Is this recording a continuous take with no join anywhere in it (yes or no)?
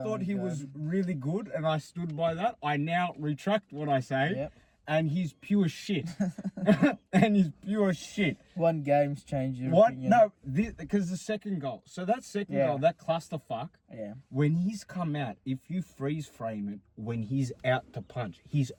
yes